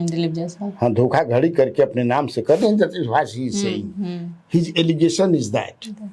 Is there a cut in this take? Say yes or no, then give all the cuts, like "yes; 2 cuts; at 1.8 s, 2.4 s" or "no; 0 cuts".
no; 0 cuts